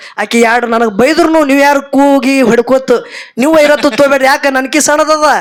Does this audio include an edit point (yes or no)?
no